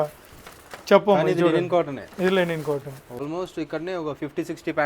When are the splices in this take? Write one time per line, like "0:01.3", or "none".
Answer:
0:03.2